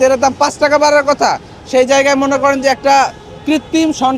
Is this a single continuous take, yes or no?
yes